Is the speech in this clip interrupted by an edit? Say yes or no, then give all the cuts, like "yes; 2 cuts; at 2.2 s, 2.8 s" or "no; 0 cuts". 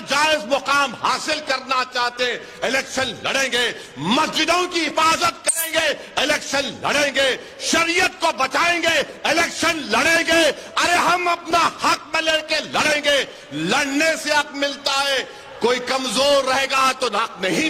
no; 0 cuts